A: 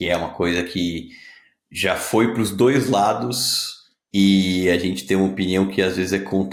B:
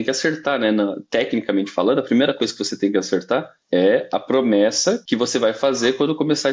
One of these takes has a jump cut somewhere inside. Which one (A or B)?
B